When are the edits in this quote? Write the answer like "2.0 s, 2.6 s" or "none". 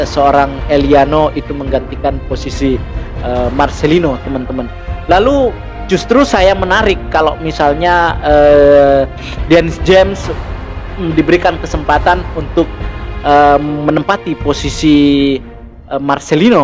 none